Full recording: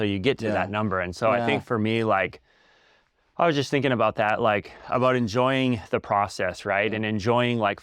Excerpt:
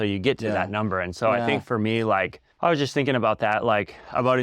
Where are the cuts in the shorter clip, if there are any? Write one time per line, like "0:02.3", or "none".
0:02.4